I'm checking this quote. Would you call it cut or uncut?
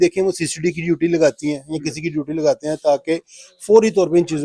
uncut